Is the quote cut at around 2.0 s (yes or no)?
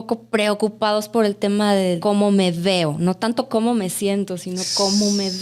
yes